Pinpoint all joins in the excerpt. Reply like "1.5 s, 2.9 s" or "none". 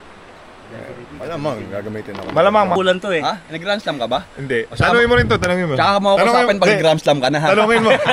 2.7 s